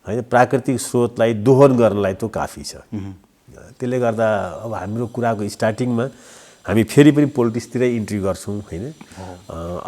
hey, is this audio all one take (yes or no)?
yes